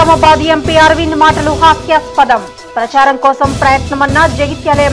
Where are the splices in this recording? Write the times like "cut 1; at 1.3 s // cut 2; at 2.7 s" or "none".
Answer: none